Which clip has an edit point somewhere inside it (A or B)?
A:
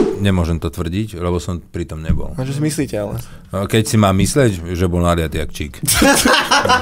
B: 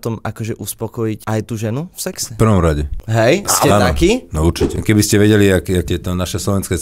B